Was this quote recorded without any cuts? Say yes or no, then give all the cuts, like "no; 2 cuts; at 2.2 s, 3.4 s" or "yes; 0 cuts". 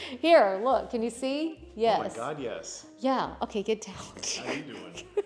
yes; 0 cuts